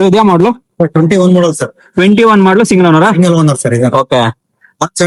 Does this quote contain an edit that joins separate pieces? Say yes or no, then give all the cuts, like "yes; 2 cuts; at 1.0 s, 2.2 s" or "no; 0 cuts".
no; 0 cuts